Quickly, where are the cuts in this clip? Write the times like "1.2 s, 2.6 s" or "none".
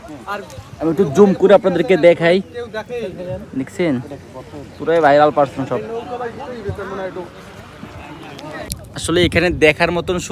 8.7 s